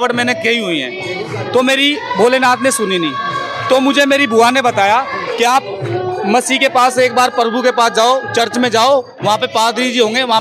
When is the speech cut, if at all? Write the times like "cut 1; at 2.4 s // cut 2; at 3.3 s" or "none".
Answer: none